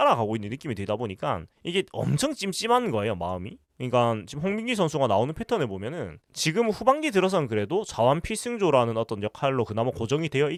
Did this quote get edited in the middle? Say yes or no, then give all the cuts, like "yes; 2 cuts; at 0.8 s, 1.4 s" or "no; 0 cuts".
no; 0 cuts